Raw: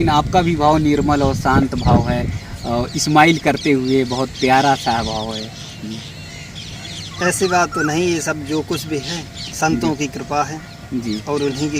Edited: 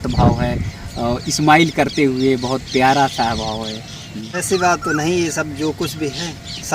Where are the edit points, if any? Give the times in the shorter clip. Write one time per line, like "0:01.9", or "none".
0:04.4